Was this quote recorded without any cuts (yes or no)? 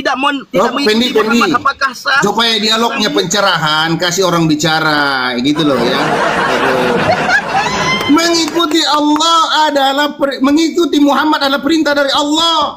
yes